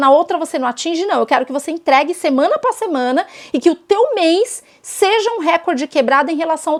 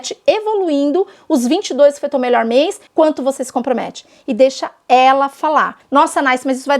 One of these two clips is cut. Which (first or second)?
second